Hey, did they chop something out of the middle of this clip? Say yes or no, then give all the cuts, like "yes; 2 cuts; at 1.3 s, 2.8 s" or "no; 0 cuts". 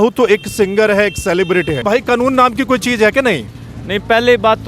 yes; 1 cut; at 1.8 s